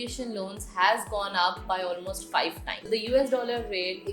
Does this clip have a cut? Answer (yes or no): yes